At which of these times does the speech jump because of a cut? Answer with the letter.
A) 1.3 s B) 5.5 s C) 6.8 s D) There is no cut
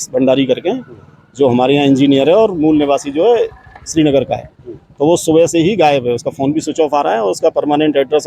D